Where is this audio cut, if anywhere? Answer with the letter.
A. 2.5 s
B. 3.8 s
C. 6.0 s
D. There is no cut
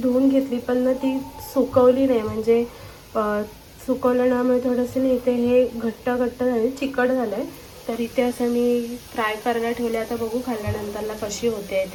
D